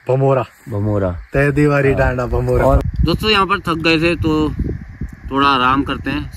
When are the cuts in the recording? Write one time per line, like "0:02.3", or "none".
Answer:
0:02.8